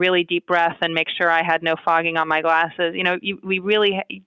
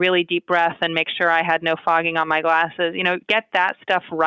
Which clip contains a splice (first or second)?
second